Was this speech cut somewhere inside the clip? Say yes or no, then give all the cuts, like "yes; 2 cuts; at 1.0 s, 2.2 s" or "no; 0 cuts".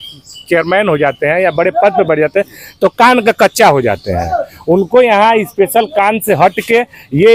no; 0 cuts